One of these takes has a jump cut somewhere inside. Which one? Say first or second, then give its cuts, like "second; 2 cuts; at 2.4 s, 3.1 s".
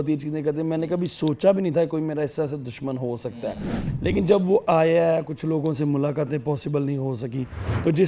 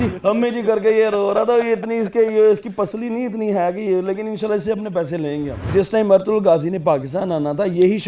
second; 1 cut; at 5.7 s